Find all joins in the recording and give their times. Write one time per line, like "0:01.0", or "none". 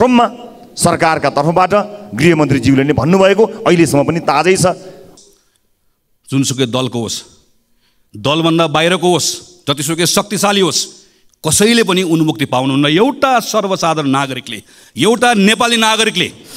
0:05.0